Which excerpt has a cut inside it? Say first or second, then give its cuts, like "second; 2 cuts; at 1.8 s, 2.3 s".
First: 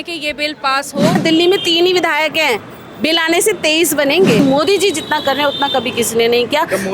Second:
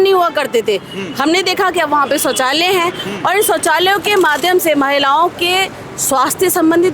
first; 2 cuts; at 1.1 s, 4.4 s